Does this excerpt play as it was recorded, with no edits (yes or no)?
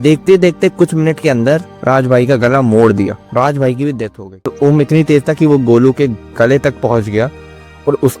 no